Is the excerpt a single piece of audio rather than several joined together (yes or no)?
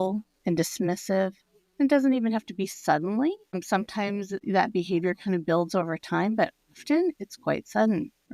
no